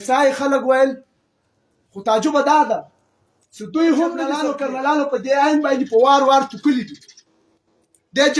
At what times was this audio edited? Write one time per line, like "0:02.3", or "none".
0:04.5

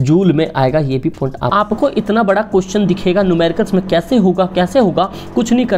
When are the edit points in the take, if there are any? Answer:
0:01.4

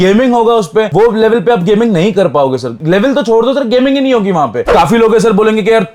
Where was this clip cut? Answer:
0:04.7

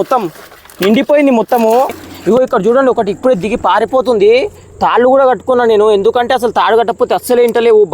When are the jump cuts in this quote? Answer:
0:02.1

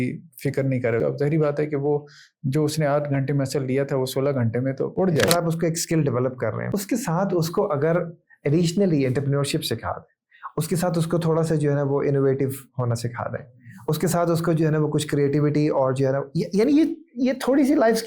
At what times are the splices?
0:01.0
0:05.3
0:06.6

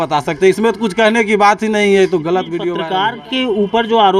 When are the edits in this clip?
0:02.8

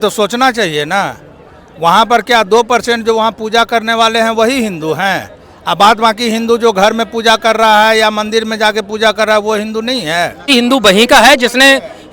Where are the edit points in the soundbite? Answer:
0:10.5

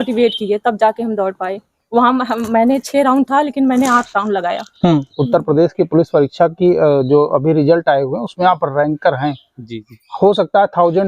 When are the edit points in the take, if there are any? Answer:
0:05.1

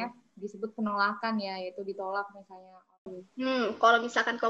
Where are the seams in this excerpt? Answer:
0:03.2

